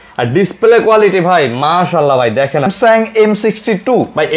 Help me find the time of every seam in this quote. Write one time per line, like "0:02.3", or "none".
0:02.7

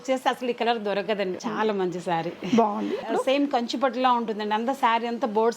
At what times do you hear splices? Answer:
0:01.4
0:03.0

